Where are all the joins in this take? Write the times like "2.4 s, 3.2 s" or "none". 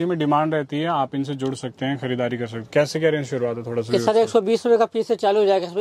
none